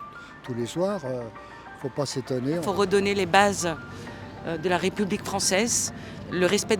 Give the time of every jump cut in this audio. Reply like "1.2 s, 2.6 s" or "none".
2.6 s